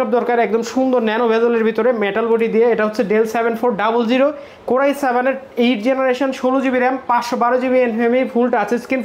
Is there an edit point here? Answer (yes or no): no